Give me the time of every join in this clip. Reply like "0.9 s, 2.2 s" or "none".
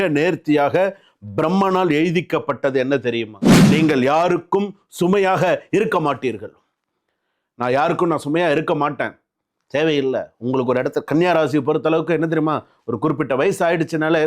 3.5 s